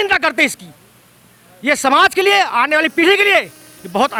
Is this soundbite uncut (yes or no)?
yes